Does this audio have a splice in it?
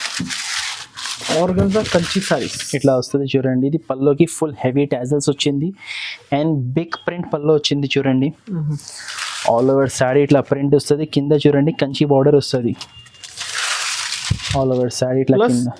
no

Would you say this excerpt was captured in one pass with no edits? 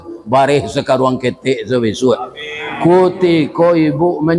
yes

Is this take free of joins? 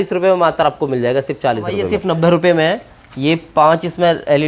no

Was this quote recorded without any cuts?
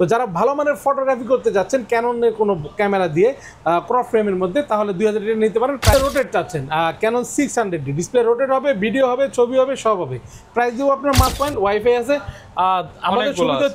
no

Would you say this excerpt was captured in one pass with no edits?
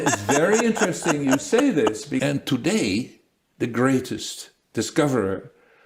no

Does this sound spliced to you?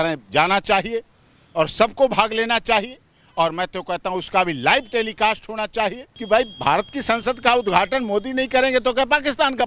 yes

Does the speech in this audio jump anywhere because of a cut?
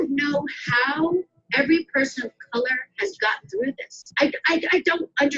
no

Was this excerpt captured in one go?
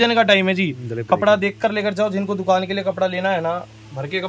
yes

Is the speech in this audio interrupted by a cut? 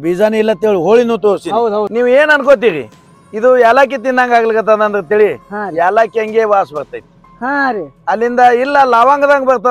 yes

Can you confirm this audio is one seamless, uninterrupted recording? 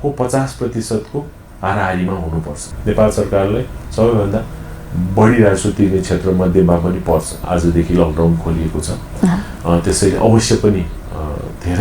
no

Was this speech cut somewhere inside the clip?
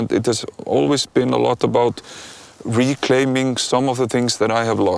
no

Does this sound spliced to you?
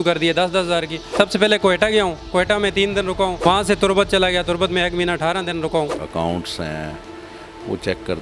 yes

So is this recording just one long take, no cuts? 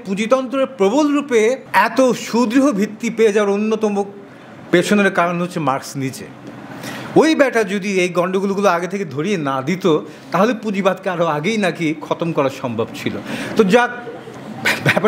yes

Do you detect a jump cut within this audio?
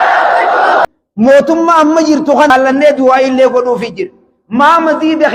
yes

